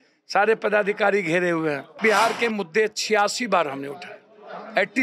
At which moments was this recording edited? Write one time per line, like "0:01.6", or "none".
0:02.0